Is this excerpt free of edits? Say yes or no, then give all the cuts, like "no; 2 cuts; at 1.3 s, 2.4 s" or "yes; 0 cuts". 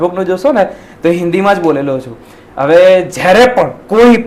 yes; 0 cuts